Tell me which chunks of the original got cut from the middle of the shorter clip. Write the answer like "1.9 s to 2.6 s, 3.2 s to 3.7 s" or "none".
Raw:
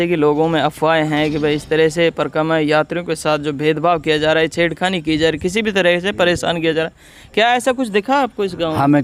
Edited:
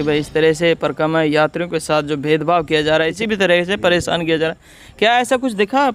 4.5 s to 5.5 s